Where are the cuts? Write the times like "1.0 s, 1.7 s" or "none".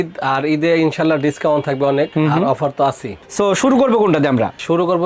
none